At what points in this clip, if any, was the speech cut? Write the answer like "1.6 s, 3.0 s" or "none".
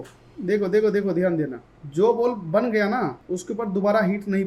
3.2 s